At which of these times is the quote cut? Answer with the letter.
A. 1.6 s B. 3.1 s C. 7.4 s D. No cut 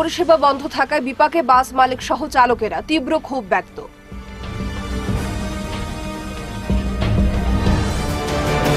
D